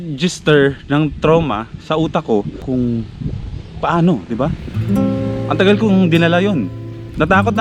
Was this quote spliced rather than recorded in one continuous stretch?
yes; 1 cut; at 2.6 s

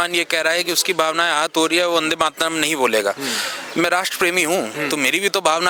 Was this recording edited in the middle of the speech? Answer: no; 0 cuts

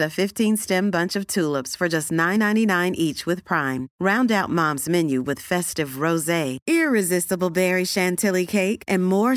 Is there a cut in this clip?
no; 0 cuts

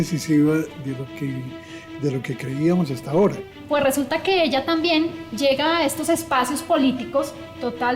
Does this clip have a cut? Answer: yes; 1 cut; at 3.6 s

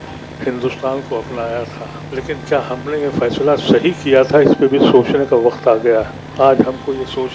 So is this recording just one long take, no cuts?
no; 2 cuts; at 1.9 s, 6.2 s

